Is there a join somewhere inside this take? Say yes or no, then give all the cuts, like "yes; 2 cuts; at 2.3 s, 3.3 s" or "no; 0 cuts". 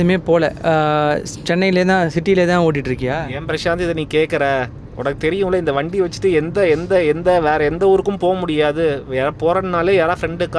no; 0 cuts